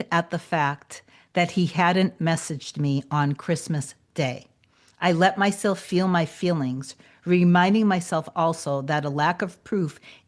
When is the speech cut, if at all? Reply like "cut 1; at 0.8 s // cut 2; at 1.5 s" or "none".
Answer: none

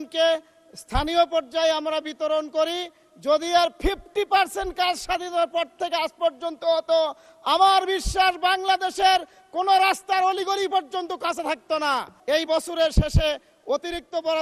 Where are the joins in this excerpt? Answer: cut 1; at 12.1 s

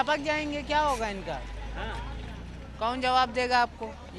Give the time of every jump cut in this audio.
none

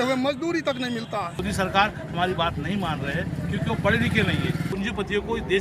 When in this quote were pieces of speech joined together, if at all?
cut 1; at 1.4 s // cut 2; at 4.7 s

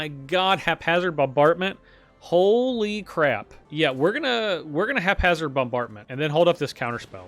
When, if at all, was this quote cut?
cut 1; at 3.6 s // cut 2; at 6.0 s

